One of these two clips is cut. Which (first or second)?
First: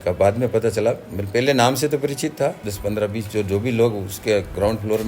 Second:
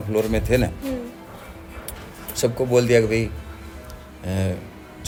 first